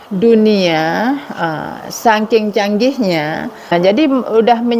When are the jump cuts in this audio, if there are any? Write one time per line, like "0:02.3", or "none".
0:03.7